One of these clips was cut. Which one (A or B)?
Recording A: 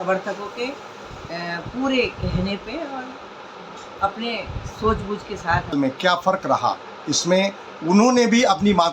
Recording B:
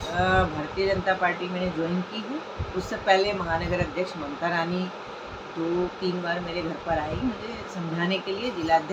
A